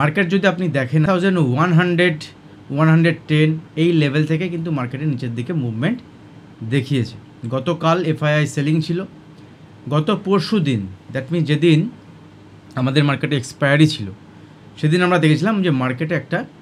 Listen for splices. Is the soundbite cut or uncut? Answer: cut